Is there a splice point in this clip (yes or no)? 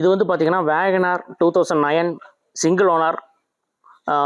no